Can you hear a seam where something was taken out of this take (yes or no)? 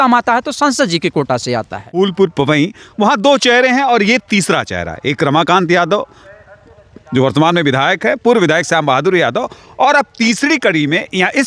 yes